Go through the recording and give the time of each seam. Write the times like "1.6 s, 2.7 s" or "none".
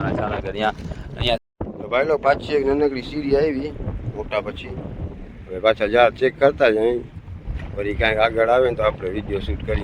1.4 s